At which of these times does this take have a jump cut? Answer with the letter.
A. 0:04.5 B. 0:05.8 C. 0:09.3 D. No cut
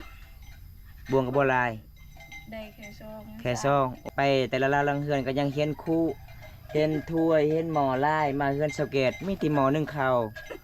A